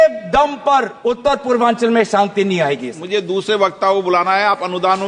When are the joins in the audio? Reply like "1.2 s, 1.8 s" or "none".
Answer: 1.0 s, 2.9 s

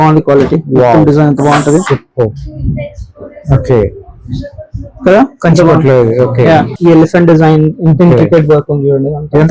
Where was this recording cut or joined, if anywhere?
6.7 s

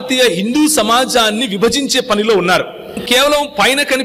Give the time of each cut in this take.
3.0 s

